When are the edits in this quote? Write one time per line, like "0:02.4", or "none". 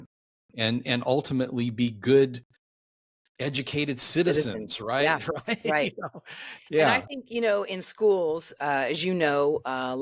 none